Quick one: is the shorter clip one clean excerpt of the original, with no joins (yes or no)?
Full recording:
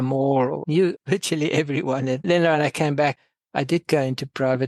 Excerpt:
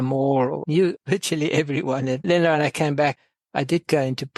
yes